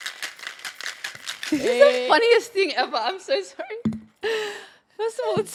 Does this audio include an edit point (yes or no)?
no